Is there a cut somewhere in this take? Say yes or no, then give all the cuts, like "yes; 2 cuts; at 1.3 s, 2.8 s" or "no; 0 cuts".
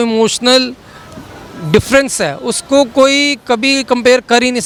no; 0 cuts